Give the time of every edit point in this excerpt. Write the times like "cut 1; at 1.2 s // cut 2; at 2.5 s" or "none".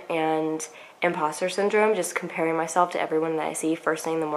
none